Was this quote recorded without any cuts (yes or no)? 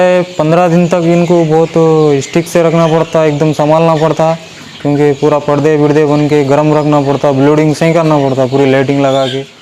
yes